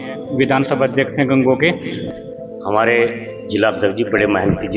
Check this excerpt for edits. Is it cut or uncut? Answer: cut